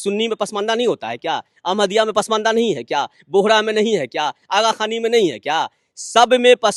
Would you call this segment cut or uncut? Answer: uncut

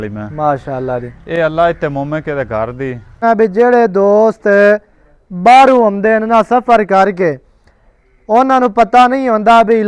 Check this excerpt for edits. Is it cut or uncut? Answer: cut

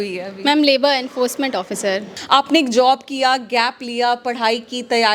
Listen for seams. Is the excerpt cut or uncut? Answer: cut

